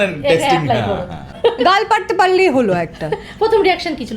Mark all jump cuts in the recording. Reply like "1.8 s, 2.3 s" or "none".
1.2 s